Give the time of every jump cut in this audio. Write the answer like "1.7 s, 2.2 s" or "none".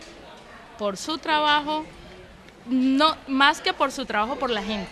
3.5 s

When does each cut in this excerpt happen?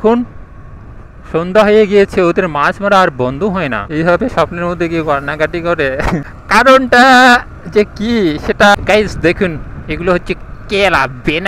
3.8 s, 6.3 s, 8.7 s

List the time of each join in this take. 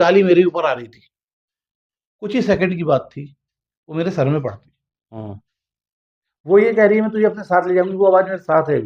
none

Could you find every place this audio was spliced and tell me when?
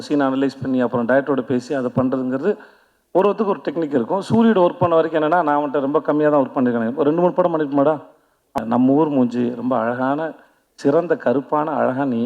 8.5 s

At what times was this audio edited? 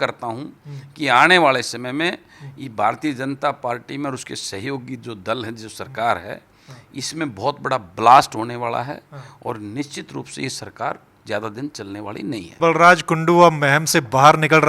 12.6 s

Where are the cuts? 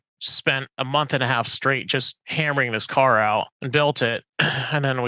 2.2 s, 3.6 s, 4.3 s

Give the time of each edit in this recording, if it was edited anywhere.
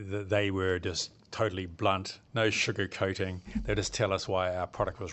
2.2 s

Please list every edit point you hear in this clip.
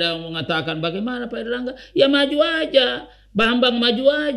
none

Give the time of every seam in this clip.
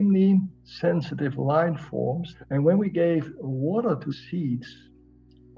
2.3 s, 4.1 s

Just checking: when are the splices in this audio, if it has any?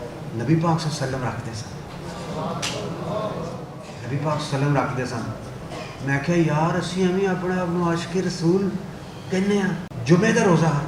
9.9 s

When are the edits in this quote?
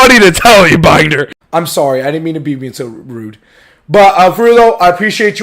1.4 s

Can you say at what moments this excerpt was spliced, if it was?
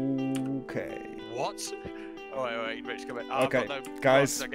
1.1 s

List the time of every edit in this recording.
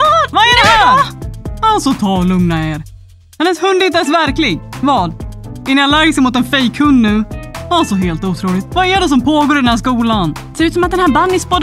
none

